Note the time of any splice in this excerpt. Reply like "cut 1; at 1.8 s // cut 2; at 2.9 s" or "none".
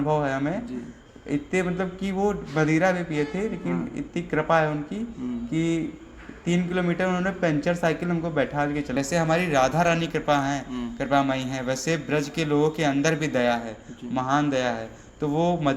cut 1; at 8.9 s

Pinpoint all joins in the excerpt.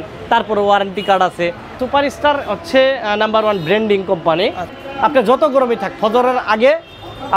cut 1; at 1.8 s // cut 2; at 4.7 s

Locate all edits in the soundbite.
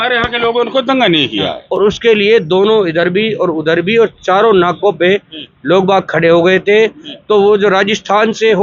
cut 1; at 1.6 s

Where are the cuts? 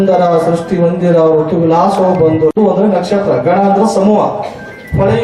none

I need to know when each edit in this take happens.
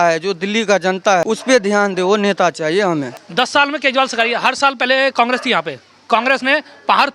cut 1; at 1.2 s // cut 2; at 3.2 s

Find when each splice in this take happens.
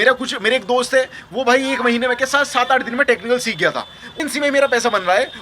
cut 1; at 4.2 s

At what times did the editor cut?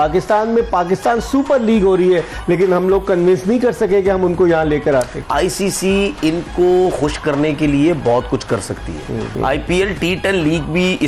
cut 1; at 5.2 s // cut 2; at 9.3 s

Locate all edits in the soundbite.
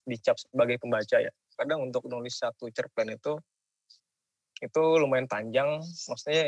cut 1; at 1.4 s

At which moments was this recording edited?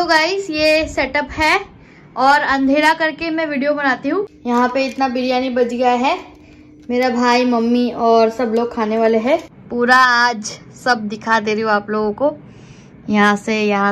cut 1; at 4.3 s // cut 2; at 9.6 s

